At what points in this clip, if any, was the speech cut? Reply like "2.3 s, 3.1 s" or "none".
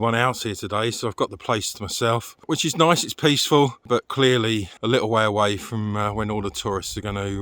2.5 s, 4.7 s